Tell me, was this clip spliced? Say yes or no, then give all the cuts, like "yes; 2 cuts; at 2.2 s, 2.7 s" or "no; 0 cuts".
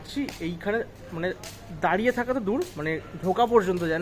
no; 0 cuts